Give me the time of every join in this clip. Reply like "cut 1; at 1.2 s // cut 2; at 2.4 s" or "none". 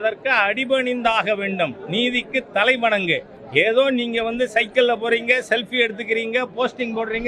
cut 1; at 3.3 s

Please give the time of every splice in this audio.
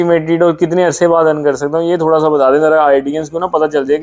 none

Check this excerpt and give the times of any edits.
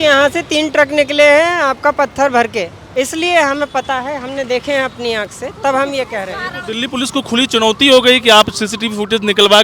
cut 1; at 2.8 s

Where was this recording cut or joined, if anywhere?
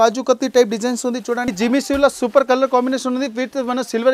cut 1; at 1.5 s

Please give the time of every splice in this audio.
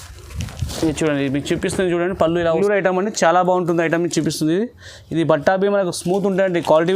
cut 1; at 2.5 s

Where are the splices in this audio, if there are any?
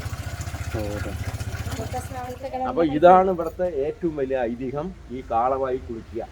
cut 1; at 2.2 s

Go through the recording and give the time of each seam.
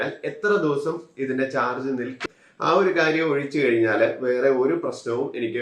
cut 1; at 2.2 s

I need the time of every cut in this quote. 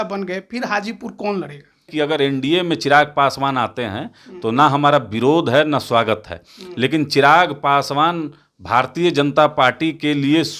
cut 1; at 1.9 s

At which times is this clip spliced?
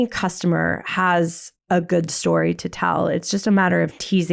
none

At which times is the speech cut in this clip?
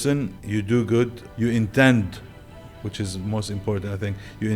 cut 1; at 1.2 s

